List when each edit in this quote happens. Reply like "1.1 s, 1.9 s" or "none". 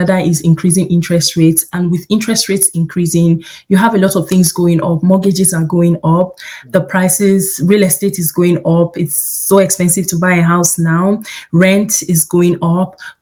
none